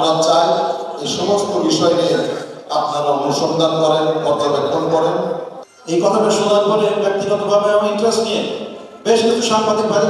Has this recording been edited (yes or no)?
yes